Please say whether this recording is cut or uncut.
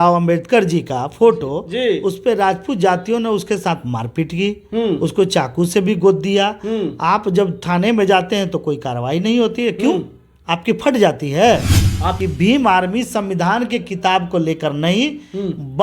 cut